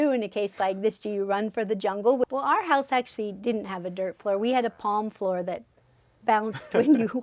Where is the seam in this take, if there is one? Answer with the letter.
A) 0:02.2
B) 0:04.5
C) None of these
A